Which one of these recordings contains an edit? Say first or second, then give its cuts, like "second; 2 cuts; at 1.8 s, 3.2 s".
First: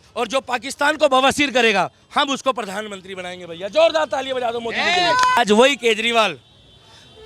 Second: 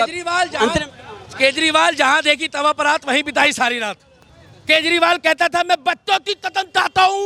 first; 1 cut; at 5.4 s